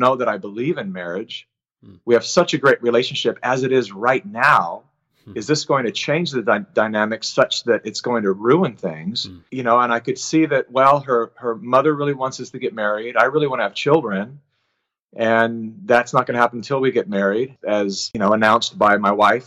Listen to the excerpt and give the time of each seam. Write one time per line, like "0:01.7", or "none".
0:17.6